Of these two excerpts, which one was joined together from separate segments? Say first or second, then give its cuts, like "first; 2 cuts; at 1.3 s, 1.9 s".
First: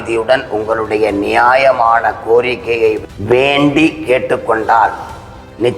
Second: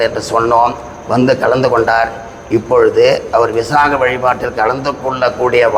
first; 1 cut; at 3.0 s